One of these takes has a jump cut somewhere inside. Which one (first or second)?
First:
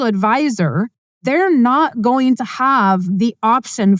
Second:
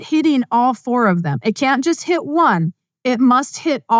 first